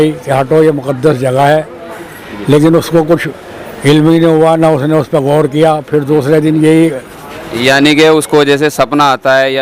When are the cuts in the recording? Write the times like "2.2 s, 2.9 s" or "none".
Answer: none